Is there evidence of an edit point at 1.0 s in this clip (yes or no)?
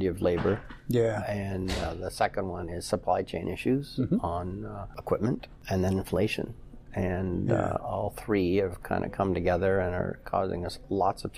no